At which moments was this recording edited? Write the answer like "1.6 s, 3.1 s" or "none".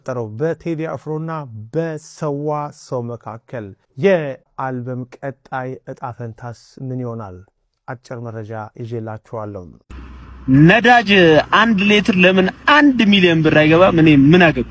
9.8 s